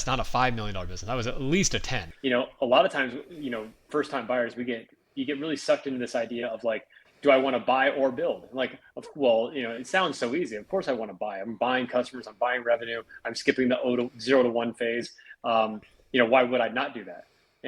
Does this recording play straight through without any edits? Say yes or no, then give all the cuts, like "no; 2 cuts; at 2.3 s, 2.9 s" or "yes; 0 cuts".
no; 1 cut; at 2.1 s